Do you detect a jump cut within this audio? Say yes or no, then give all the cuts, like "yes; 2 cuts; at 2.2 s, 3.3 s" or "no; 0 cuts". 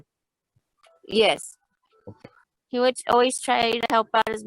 yes; 1 cut; at 2.1 s